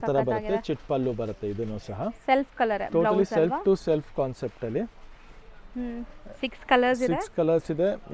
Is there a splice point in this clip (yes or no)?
no